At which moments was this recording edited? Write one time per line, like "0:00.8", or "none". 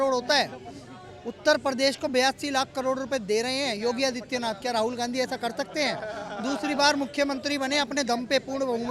none